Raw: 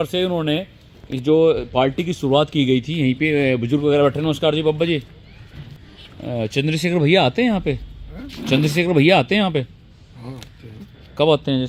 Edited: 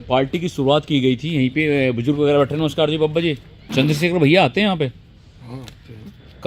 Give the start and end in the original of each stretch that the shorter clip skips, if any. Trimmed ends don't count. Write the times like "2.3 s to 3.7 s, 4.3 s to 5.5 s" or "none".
5.2 s to 8.3 s